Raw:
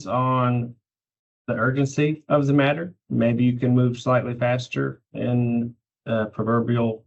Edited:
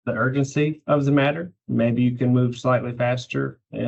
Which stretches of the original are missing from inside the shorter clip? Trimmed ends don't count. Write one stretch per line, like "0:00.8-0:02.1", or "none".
none

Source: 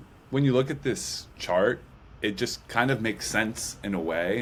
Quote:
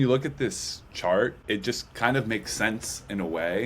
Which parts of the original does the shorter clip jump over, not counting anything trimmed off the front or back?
0:01.8-0:02.1

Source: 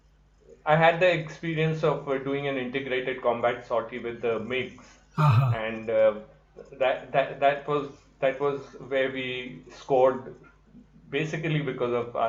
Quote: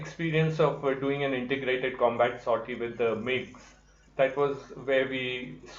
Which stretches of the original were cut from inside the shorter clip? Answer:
0:05.1-0:07.9

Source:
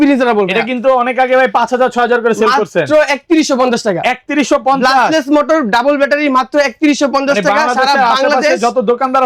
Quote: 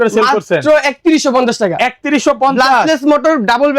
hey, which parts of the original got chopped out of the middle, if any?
none

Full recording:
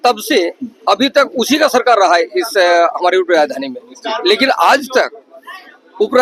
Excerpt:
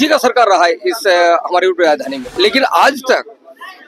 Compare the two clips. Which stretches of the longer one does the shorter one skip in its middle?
0:03.7-0:04.1

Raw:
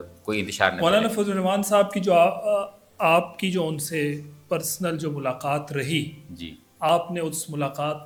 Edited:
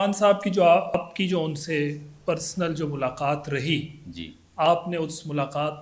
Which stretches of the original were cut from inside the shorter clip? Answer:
0:02.4-0:03.2

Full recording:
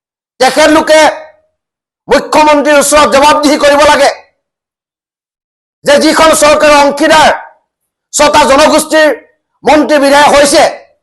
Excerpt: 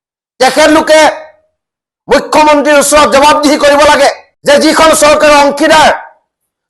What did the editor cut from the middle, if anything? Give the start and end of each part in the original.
0:04.3-0:05.7

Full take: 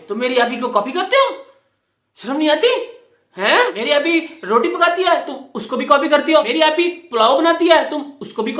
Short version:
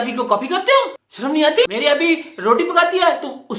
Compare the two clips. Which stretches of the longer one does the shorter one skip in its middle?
0:01.5-0:02.1
0:02.7-0:03.7

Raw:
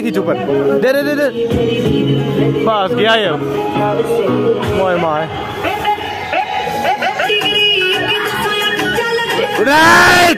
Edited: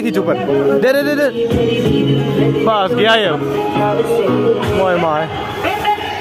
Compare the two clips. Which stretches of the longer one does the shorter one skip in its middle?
none

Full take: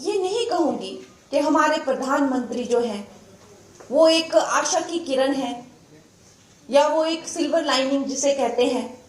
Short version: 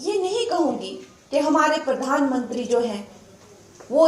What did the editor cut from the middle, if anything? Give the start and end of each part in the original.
none

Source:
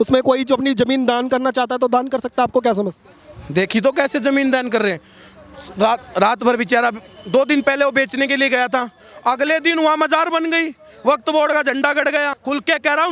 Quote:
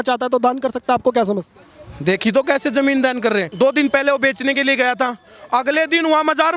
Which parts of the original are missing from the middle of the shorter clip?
0:05.0-0:07.2

